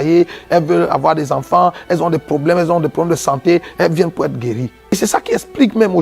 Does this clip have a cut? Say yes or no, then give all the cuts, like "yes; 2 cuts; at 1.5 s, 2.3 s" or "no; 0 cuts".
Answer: yes; 1 cut; at 4.9 s